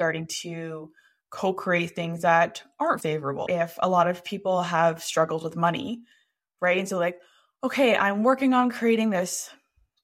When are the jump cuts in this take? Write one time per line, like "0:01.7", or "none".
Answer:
0:03.4